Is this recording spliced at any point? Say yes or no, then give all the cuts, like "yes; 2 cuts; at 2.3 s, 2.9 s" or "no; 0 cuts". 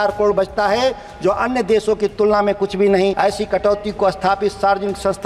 yes; 1 cut; at 3.2 s